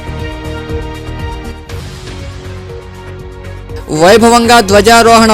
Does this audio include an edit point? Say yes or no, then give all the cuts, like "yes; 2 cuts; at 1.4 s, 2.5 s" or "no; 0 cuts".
yes; 1 cut; at 2.9 s